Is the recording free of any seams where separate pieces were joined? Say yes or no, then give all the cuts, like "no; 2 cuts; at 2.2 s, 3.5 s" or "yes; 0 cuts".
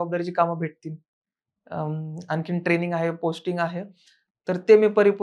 yes; 0 cuts